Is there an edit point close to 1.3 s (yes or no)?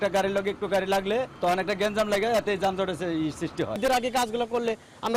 yes